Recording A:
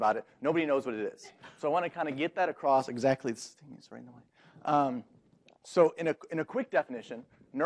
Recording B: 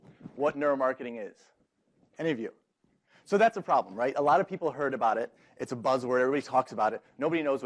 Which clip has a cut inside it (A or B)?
B